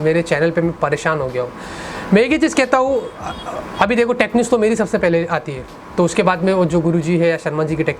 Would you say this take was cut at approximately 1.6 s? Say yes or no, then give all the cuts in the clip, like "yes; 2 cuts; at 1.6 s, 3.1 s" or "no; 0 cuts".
no; 0 cuts